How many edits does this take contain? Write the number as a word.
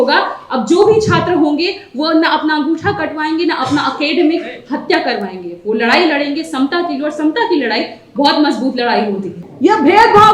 one